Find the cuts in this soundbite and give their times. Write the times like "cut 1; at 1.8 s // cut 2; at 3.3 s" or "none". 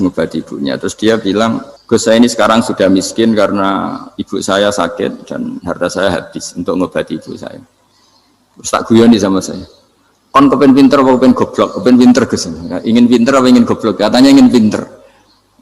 cut 1; at 1.7 s

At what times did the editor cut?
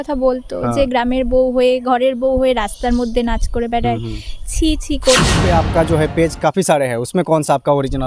cut 1; at 5.4 s

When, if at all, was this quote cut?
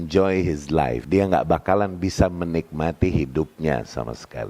cut 1; at 1.0 s

